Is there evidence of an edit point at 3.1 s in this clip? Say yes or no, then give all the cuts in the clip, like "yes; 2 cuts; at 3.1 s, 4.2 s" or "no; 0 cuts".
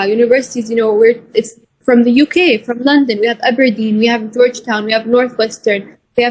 no; 0 cuts